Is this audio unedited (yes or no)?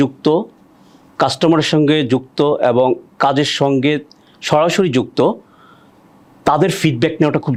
yes